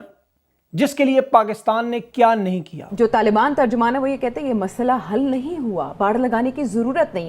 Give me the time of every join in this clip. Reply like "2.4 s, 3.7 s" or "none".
2.8 s